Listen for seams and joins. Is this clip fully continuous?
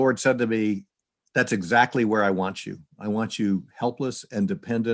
yes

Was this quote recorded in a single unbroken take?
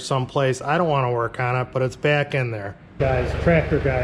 no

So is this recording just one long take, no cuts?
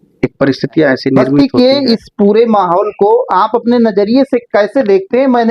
no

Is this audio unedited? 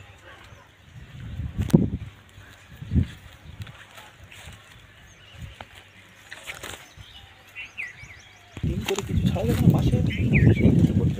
yes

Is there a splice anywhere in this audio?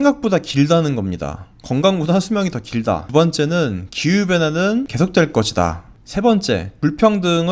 yes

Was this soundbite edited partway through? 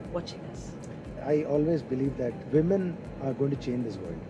yes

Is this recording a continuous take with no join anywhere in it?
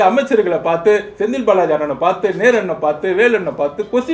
yes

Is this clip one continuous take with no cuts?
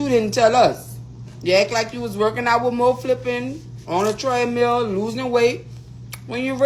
yes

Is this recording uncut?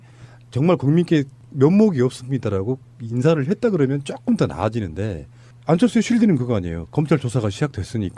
yes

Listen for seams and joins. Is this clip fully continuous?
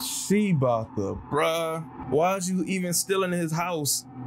no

